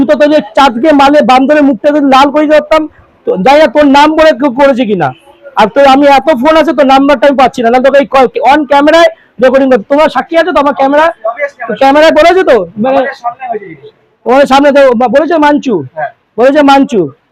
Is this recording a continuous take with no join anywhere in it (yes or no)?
yes